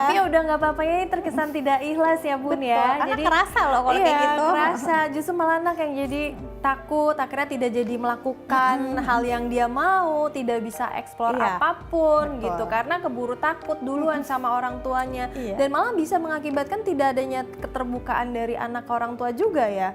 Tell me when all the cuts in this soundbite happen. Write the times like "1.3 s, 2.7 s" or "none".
none